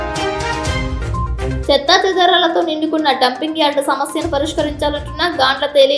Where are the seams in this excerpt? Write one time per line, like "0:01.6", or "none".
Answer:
none